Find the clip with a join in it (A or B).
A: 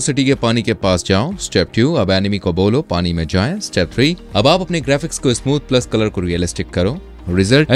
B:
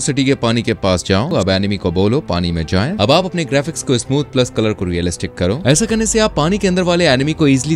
B